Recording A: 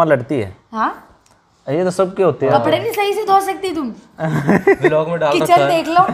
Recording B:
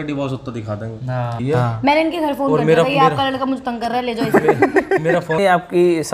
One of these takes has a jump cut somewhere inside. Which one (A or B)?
B